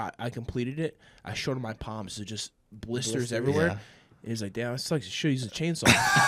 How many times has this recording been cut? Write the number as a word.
zero